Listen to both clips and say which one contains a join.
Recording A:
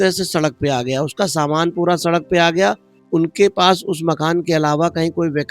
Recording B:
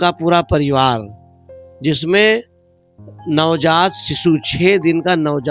A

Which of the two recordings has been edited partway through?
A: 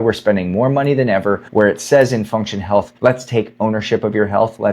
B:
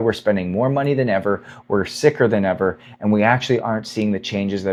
A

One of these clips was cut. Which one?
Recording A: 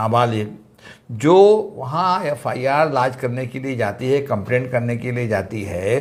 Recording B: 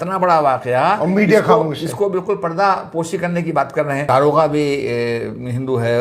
B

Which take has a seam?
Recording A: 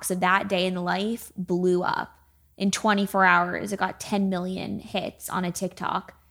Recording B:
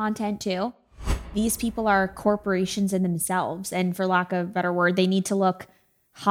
B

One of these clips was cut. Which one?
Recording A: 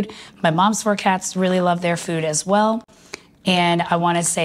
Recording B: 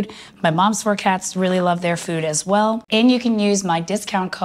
B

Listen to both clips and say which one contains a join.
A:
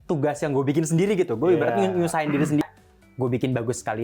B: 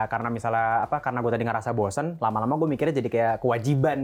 A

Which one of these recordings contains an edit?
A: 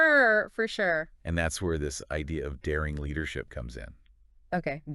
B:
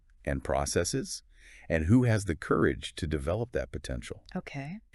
A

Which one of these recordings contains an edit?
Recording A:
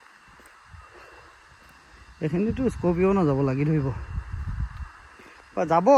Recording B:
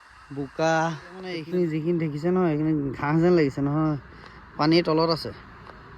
B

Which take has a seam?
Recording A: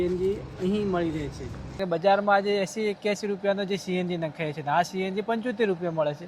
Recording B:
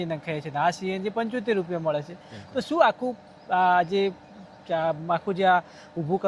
A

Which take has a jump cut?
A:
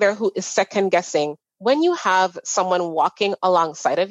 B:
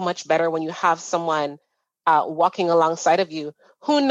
A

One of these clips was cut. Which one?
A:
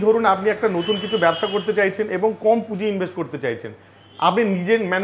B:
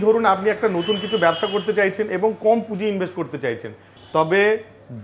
B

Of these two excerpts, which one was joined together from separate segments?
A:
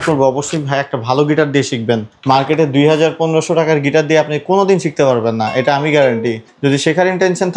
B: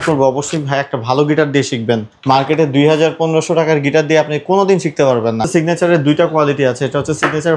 B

